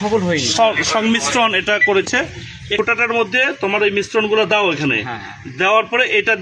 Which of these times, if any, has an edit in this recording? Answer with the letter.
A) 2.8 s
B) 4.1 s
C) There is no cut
A